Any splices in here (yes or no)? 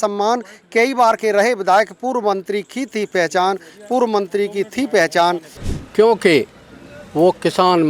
yes